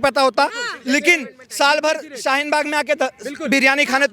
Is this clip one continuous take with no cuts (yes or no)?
yes